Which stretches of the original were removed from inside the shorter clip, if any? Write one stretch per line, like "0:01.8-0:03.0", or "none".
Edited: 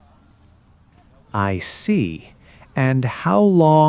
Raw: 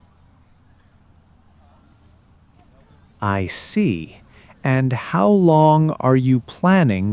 0:02.9-0:03.2